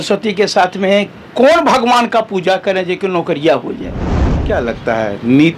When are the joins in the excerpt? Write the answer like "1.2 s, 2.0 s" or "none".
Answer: 4.3 s